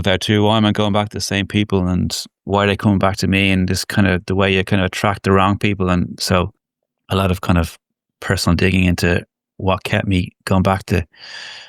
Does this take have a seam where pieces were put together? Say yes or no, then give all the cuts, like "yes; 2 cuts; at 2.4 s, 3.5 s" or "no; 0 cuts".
no; 0 cuts